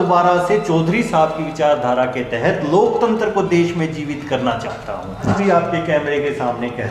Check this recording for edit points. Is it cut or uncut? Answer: cut